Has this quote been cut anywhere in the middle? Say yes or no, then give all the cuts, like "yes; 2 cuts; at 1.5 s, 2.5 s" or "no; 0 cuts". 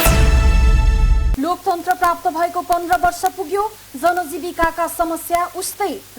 yes; 1 cut; at 1.2 s